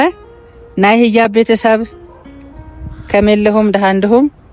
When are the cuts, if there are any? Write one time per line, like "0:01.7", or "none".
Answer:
none